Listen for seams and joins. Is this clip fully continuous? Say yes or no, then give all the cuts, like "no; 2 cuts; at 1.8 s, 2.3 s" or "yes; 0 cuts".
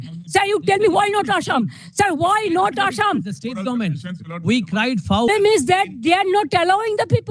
no; 1 cut; at 5.3 s